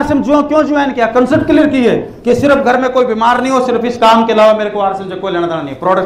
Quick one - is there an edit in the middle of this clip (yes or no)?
no